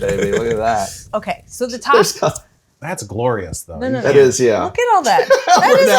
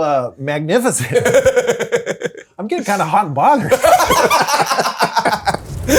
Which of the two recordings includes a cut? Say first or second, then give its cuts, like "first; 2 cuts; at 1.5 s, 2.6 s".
first; 1 cut; at 1.0 s